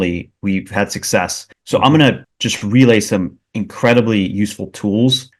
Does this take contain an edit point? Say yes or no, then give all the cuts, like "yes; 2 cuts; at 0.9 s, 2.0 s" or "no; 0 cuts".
no; 0 cuts